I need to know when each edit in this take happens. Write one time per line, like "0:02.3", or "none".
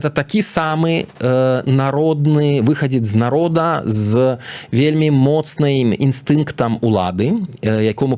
none